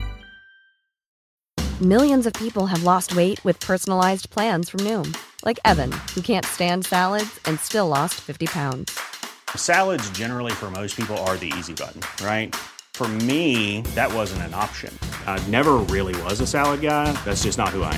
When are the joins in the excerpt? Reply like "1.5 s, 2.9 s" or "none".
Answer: 1.1 s